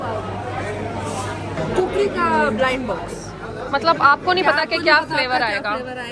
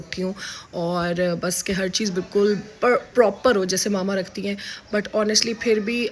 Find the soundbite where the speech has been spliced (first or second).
first